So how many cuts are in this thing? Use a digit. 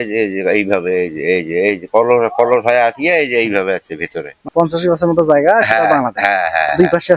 1